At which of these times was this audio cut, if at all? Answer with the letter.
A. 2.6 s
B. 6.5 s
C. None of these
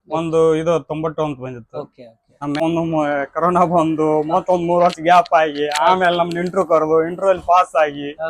A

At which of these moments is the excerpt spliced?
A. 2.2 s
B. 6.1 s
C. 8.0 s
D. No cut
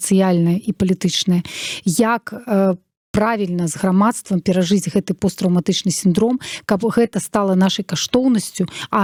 D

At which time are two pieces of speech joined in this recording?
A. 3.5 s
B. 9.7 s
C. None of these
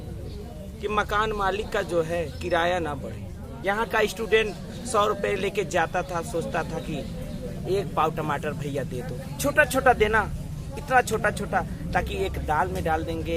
A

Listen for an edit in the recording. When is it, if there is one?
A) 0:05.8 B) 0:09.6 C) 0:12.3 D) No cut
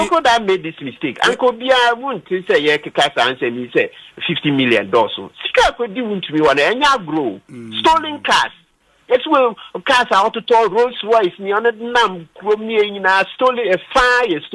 C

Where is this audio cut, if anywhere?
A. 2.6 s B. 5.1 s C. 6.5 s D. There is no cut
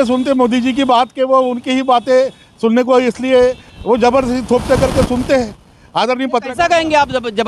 D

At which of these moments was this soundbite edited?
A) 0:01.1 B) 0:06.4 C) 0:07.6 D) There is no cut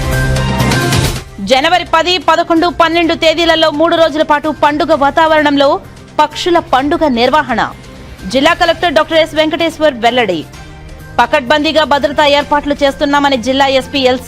A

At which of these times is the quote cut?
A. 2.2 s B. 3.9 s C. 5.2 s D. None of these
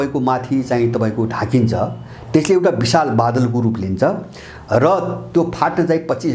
C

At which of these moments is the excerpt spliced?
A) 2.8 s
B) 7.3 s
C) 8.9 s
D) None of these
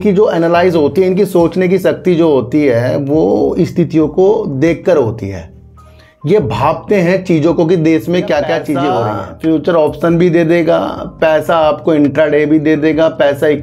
C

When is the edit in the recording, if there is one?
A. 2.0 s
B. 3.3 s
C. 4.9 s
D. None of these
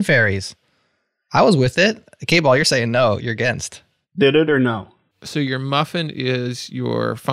C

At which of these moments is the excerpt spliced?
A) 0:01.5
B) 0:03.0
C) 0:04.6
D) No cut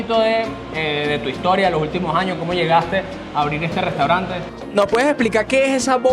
C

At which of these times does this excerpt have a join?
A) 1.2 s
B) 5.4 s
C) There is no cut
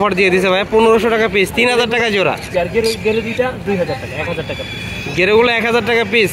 C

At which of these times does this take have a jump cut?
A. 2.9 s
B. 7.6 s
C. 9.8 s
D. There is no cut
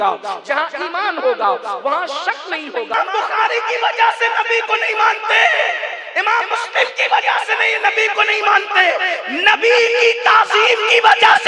A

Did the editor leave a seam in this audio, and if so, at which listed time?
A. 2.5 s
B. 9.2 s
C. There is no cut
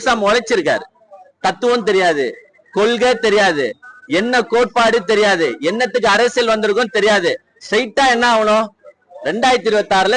C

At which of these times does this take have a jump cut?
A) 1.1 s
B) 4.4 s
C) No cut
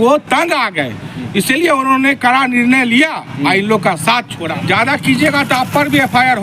B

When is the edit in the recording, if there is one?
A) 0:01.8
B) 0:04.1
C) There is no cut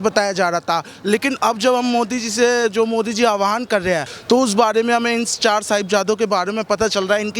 B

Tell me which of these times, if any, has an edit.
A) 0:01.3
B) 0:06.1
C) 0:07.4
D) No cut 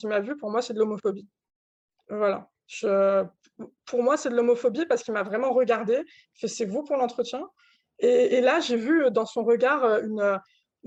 D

